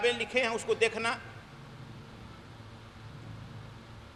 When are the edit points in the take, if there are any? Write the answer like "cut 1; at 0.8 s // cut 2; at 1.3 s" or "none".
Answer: none